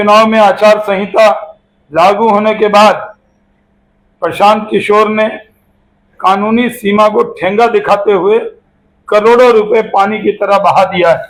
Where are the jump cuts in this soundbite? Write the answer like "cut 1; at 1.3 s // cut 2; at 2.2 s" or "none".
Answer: none